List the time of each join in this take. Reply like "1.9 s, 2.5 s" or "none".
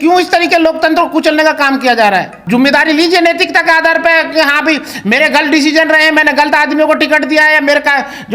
2.4 s